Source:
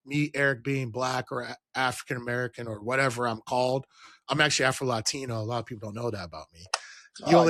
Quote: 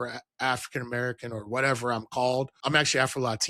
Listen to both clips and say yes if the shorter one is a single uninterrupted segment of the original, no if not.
no